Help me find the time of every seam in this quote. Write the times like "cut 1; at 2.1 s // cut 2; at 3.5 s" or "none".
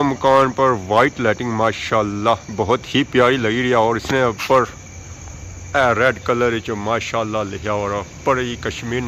none